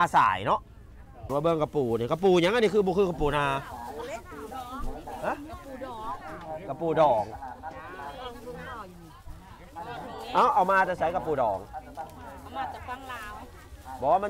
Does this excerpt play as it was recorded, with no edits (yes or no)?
no